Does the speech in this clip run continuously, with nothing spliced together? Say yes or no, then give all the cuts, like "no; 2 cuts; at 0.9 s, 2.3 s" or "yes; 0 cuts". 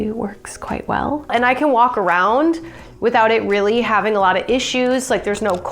no; 1 cut; at 1.3 s